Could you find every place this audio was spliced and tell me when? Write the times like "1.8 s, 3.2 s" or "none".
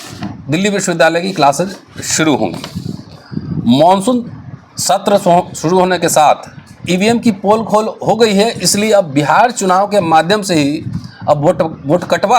6.8 s

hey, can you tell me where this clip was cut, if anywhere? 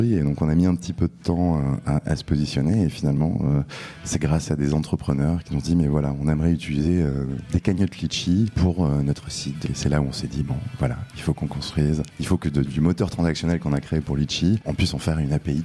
5.4 s, 8.5 s, 9.6 s, 12.1 s, 14.6 s

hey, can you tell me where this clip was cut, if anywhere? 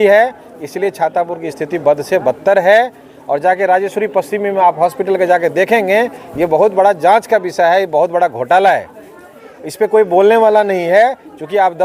none

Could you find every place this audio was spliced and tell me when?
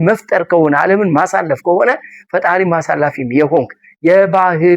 none

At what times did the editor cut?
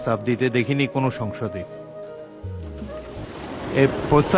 1.4 s, 3.2 s

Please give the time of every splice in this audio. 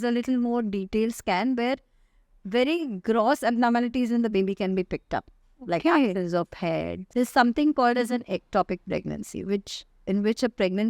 7.0 s

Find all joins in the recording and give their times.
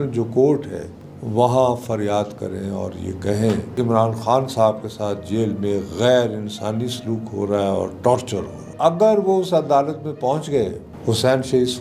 3.7 s, 8.7 s, 10.9 s

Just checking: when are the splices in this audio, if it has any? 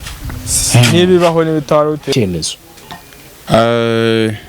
2.1 s

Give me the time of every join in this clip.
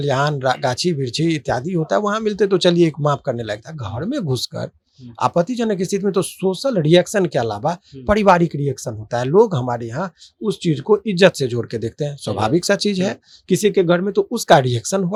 none

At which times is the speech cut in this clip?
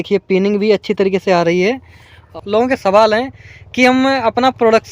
2.3 s

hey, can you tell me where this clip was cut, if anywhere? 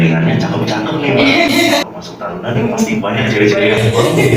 1.8 s

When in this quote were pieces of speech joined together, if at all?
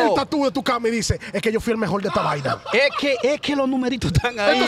none

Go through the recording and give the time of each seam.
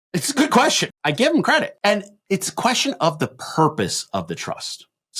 0.9 s

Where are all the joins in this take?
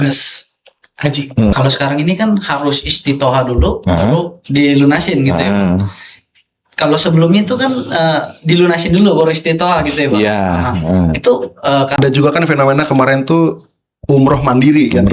1.5 s, 12.0 s

